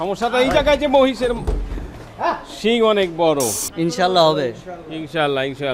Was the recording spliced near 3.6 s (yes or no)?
yes